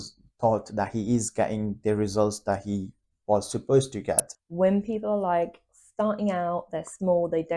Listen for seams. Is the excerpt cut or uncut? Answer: cut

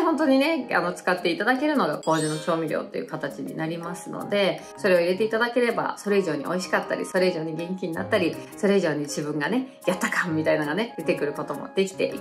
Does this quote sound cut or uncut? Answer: uncut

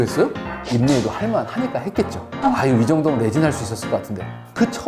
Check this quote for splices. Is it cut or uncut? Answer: uncut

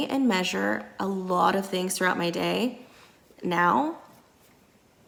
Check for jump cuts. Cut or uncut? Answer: uncut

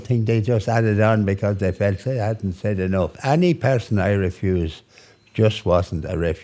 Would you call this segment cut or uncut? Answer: cut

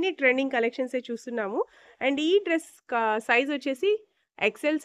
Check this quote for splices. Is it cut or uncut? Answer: uncut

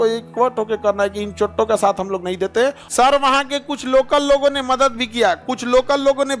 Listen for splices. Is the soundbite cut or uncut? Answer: cut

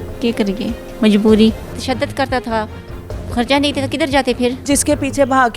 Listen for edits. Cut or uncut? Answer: cut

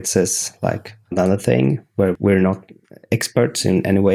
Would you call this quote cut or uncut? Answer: uncut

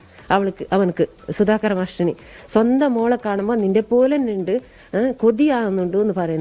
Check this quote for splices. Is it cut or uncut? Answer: uncut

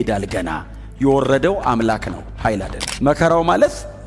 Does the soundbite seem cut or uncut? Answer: cut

